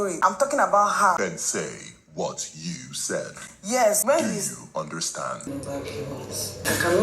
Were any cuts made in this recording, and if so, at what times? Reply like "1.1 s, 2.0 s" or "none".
5.5 s